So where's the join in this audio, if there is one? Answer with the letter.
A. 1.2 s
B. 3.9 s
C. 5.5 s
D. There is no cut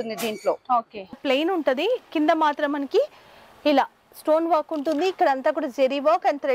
A